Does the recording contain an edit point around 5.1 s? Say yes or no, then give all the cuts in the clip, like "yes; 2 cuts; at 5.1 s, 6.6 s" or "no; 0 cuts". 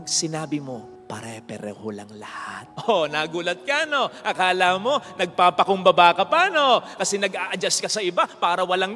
no; 1 cut; at 2.7 s